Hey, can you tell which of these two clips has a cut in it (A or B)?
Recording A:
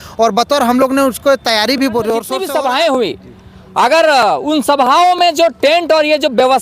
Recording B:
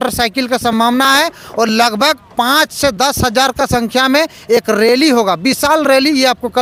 A